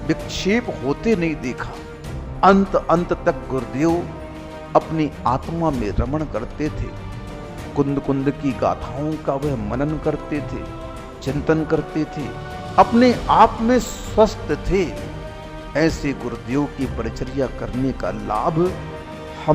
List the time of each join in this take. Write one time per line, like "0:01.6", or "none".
none

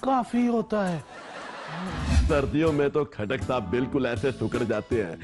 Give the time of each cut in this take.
0:02.2

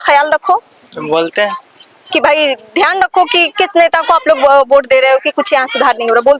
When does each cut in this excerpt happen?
none

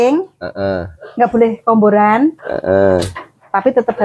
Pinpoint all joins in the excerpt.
none

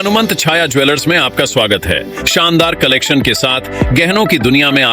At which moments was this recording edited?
0:02.2

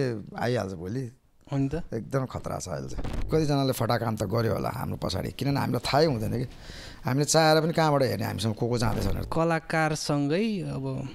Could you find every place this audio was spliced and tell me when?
0:03.3
0:09.2

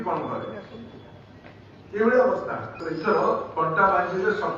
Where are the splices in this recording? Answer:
0:02.8

